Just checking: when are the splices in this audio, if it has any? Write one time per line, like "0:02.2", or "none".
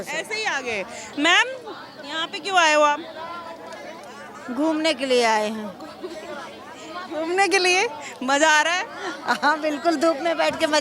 0:01.0